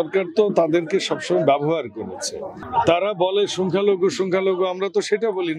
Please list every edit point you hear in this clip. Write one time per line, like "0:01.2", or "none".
0:02.6